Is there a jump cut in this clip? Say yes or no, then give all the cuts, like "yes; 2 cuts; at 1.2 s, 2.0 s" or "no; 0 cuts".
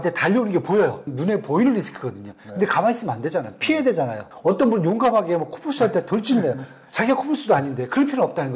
yes; 2 cuts; at 1.1 s, 4.3 s